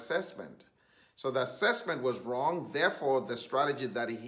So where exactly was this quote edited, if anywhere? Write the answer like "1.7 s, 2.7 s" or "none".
none